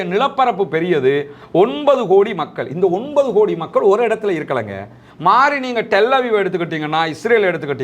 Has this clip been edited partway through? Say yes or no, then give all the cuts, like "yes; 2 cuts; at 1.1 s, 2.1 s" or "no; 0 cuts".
yes; 1 cut; at 5.0 s